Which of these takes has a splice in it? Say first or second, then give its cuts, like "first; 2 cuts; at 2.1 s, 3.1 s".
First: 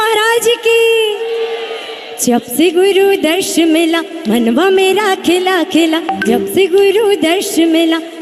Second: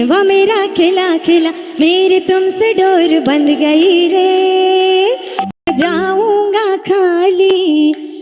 second; 1 cut; at 5.1 s